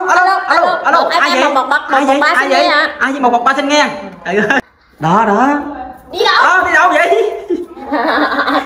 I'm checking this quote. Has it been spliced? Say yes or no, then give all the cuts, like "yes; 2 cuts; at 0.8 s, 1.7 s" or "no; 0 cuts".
yes; 1 cut; at 4.6 s